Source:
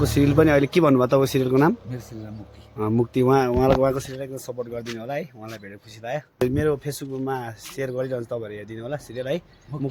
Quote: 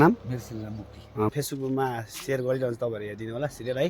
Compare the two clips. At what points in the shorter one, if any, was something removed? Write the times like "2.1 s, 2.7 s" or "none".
1.3 s